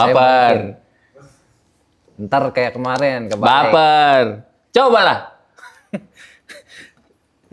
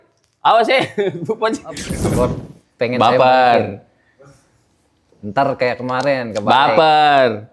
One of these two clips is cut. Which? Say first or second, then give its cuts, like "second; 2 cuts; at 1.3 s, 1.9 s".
second; 1 cut; at 2.1 s